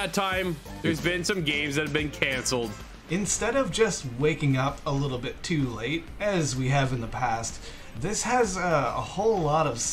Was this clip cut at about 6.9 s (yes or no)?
no